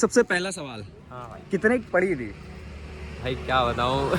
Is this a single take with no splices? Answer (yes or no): yes